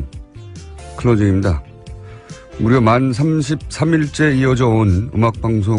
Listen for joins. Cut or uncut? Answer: cut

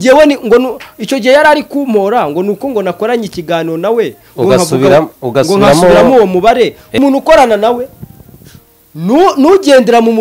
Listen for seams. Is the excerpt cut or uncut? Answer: cut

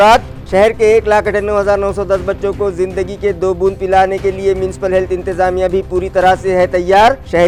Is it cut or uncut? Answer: uncut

